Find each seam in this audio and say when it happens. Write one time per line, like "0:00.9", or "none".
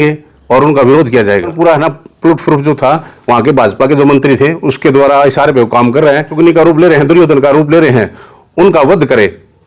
0:01.5
0:06.3